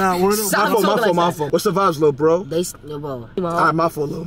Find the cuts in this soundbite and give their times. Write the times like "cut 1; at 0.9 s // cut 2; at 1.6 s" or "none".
cut 1; at 1.5 s // cut 2; at 3.4 s